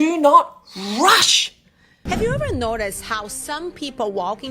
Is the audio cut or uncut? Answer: cut